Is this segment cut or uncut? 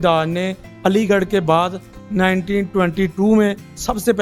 uncut